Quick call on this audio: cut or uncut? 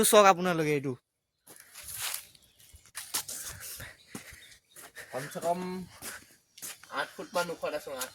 uncut